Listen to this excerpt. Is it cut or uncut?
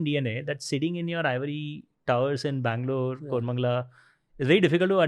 uncut